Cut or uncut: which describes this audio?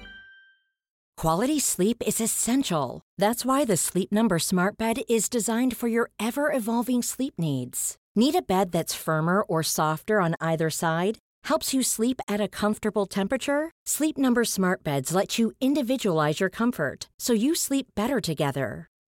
cut